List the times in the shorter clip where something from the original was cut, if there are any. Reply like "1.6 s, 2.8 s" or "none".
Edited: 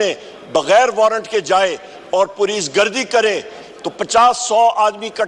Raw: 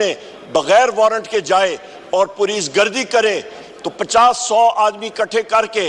none